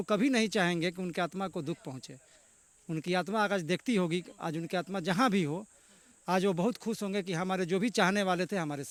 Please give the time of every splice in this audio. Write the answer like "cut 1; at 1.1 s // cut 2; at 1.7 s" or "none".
none

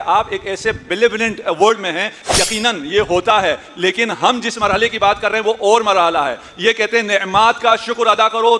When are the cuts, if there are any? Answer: cut 1; at 2.2 s

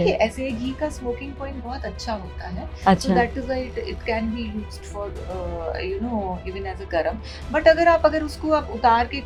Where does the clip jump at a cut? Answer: none

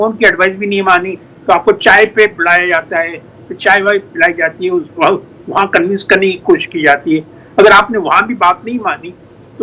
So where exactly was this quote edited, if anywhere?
none

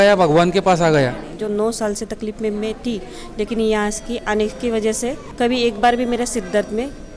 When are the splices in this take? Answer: cut 1; at 1.3 s

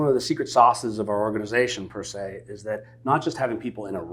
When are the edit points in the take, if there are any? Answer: none

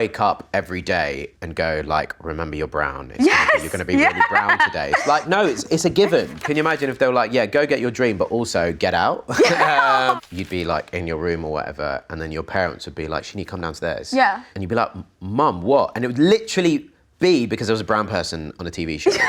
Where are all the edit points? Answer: cut 1; at 1.3 s // cut 2; at 6.4 s // cut 3; at 10.2 s // cut 4; at 14.5 s

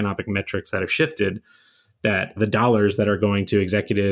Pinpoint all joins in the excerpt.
cut 1; at 2.4 s

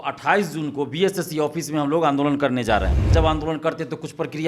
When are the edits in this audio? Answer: cut 1; at 3.1 s

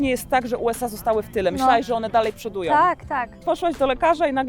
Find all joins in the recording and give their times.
cut 1; at 3.4 s

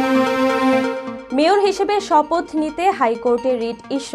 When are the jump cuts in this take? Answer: none

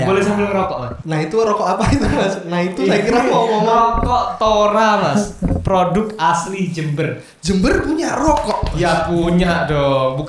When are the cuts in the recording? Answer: cut 1; at 0.9 s

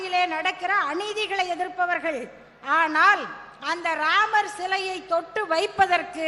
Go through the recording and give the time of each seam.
none

